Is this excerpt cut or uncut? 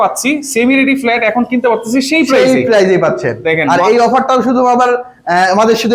uncut